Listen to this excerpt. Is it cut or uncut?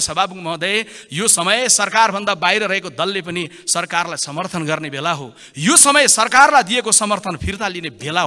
uncut